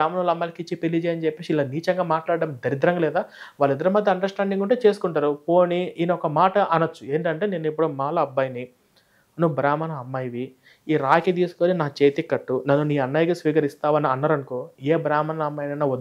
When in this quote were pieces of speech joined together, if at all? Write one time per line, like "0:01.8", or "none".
none